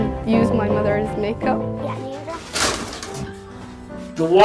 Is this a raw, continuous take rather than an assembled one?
no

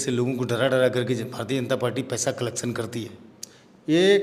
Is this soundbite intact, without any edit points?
yes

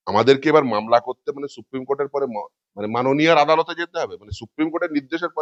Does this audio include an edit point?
no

